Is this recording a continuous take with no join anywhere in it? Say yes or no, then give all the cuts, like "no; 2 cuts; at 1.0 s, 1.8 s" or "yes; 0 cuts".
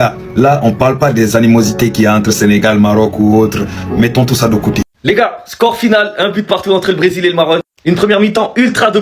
no; 1 cut; at 4.9 s